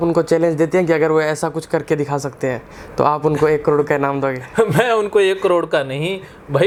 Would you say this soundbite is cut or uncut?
uncut